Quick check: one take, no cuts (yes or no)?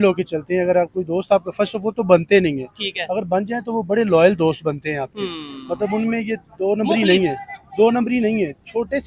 yes